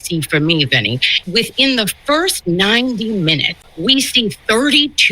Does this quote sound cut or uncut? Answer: cut